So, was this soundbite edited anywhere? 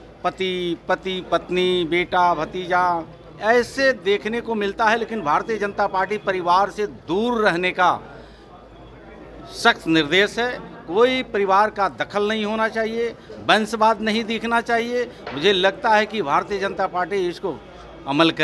no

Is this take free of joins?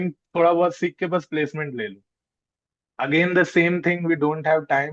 yes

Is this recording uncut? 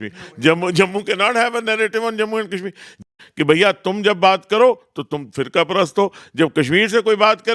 no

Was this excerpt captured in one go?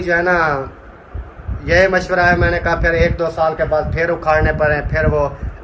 yes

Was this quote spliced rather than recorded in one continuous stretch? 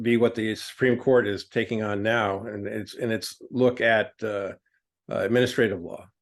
no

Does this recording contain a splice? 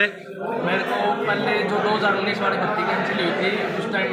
no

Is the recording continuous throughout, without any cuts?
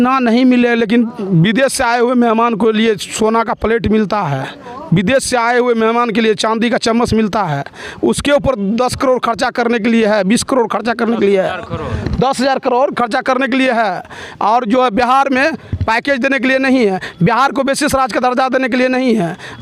yes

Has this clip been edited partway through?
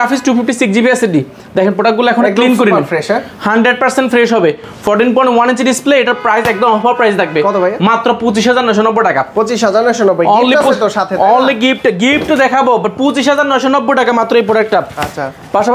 no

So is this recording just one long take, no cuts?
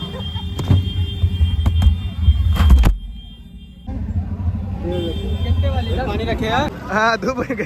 no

